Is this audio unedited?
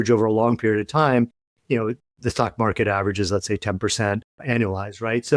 no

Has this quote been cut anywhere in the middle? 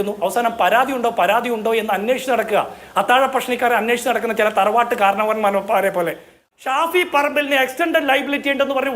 yes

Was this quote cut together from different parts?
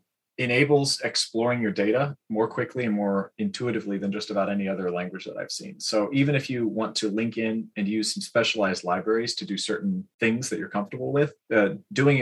yes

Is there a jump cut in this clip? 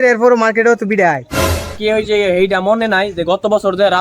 yes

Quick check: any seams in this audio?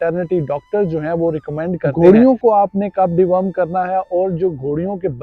yes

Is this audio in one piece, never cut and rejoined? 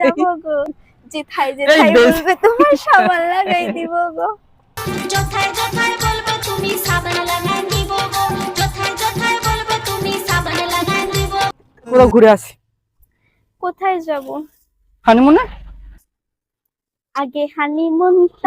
no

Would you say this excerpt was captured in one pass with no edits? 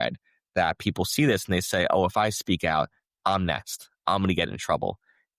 yes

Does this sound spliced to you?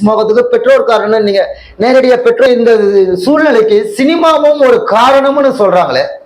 yes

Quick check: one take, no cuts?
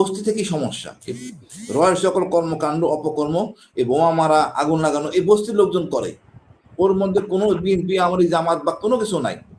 yes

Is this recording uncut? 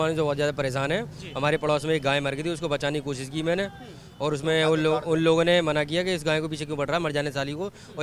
yes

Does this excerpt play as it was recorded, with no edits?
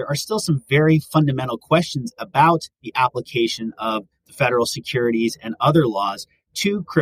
yes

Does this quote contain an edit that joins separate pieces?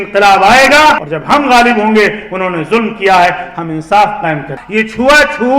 yes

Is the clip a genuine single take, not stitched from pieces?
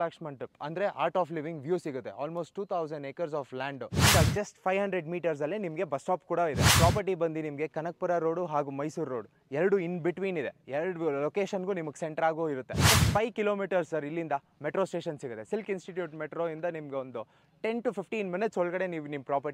no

